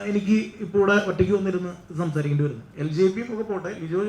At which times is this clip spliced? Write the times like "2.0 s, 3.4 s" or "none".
2.7 s

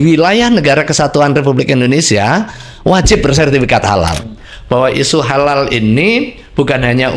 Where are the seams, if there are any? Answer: 4.4 s

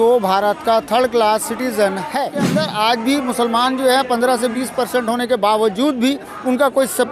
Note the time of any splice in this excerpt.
2.6 s

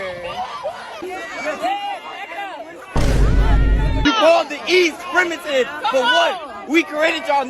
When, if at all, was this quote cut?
4.0 s

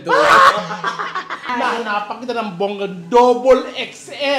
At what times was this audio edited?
1.5 s

